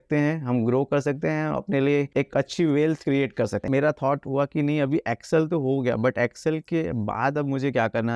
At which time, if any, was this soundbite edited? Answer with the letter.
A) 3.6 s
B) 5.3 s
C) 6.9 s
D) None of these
A